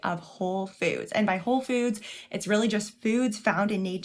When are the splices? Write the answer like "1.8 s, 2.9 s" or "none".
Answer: none